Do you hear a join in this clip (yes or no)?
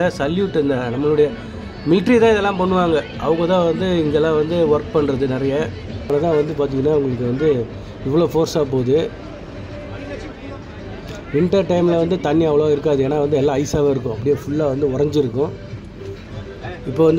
yes